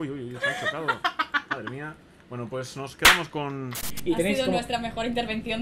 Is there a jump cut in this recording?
yes; 1 cut; at 3.8 s

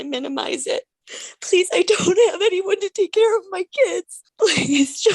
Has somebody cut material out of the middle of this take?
yes; 2 cuts; at 1.0 s, 4.2 s

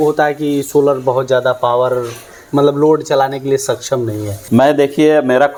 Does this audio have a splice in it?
no; 0 cuts

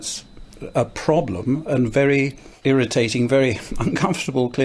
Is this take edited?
yes; 1 cut; at 2.4 s

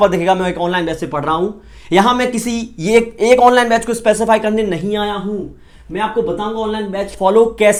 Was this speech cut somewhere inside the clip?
no; 0 cuts

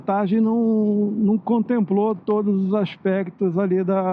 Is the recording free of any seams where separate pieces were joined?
yes; 0 cuts

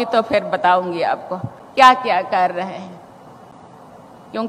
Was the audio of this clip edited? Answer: no; 0 cuts

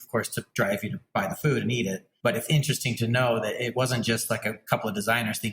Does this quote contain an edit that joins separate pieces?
yes; 3 cuts; at 1.0 s, 2.1 s, 3.7 s

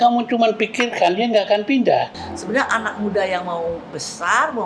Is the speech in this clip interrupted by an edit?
yes; 1 cut; at 2.3 s

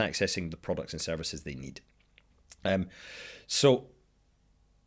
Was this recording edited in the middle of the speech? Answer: no; 0 cuts

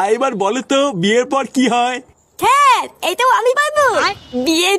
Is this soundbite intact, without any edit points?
yes; 0 cuts

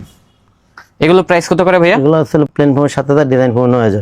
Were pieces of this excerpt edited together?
no; 0 cuts

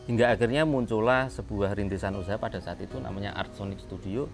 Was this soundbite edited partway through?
no; 0 cuts

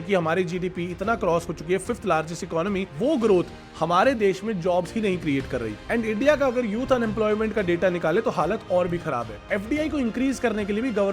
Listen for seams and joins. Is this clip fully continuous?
no; 2 cuts; at 5.8 s, 9.3 s

